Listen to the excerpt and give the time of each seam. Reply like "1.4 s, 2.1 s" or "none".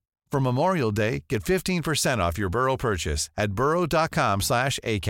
none